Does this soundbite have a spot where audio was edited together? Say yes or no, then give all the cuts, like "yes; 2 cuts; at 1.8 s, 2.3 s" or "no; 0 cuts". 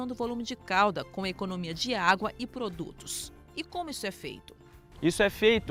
no; 0 cuts